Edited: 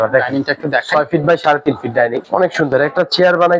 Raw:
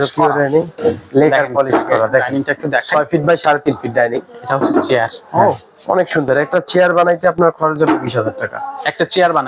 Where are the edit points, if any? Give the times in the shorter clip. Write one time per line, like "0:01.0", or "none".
0:02.2